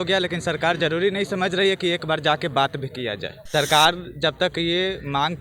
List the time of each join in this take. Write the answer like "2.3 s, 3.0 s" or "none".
3.3 s